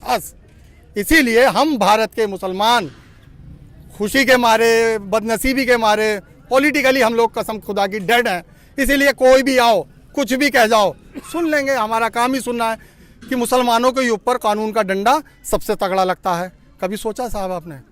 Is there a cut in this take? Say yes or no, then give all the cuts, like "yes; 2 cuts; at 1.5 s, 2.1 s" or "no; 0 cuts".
yes; 1 cut; at 12.9 s